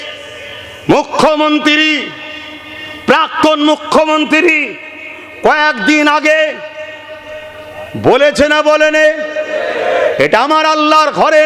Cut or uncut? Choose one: uncut